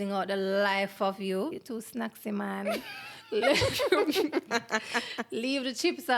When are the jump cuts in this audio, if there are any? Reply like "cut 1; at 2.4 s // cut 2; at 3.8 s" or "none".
cut 1; at 1.6 s